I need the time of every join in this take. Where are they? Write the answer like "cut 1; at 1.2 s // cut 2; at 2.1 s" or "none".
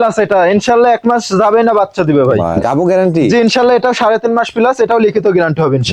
cut 1; at 2.5 s